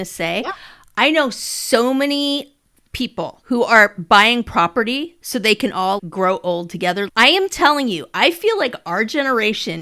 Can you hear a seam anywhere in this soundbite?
yes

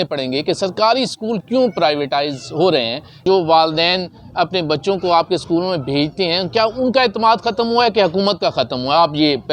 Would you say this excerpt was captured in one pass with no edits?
no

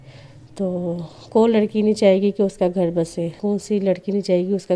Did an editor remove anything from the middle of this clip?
yes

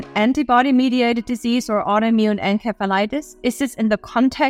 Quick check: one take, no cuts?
yes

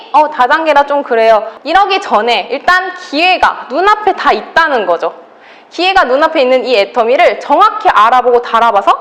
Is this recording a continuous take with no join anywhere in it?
no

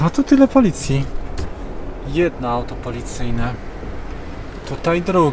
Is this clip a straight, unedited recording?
yes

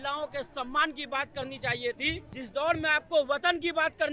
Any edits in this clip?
yes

